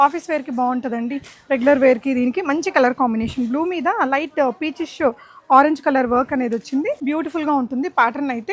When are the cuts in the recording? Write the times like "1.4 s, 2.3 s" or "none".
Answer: 7.0 s